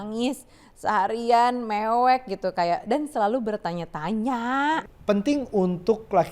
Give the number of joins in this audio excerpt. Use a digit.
1